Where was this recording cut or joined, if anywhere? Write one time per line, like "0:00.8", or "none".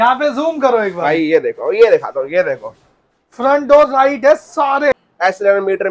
0:04.9

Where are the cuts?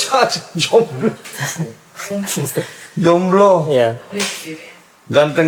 none

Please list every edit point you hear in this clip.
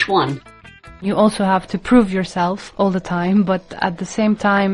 0:01.0
0:01.7

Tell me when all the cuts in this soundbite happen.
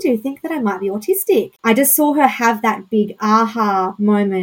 0:01.5

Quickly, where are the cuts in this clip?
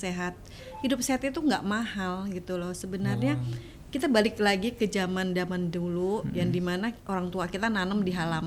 0:07.0

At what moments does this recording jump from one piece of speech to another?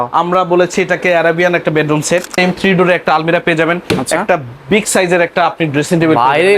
0:02.3

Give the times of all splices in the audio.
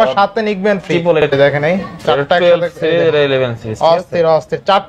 0:01.3

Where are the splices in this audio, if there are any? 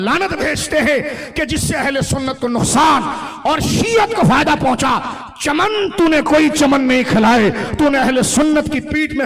none

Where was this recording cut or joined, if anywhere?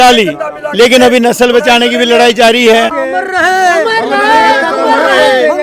0:03.0

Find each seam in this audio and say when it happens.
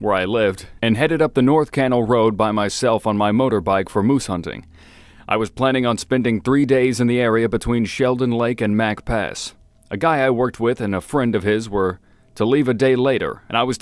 0:10.4

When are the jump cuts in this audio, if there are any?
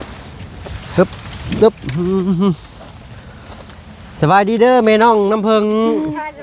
none

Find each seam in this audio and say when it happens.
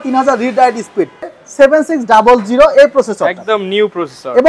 0:01.3

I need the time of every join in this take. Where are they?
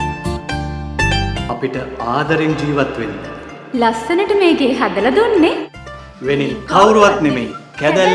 0:01.3

